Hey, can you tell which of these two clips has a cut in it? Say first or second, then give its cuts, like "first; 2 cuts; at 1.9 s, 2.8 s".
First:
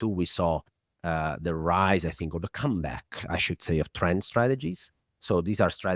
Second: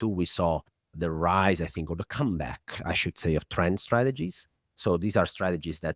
second; 1 cut; at 0.9 s